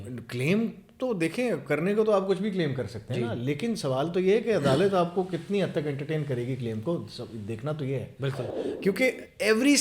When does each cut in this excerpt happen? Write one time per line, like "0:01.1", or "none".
0:08.5